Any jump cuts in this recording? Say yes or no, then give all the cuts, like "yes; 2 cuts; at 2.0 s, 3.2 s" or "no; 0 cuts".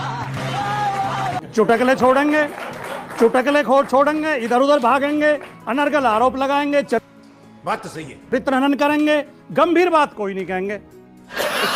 no; 0 cuts